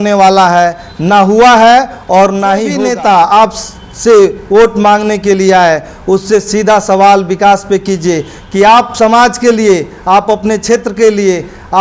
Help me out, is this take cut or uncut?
cut